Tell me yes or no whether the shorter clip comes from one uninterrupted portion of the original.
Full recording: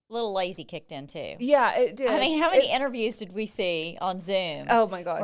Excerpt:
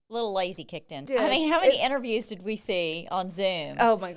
no